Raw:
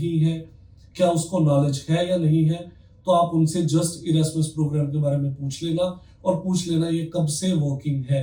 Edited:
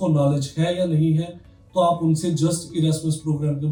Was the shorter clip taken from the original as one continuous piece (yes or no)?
yes